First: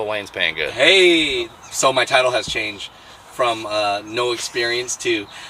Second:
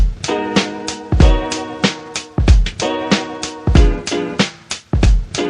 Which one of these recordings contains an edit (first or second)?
first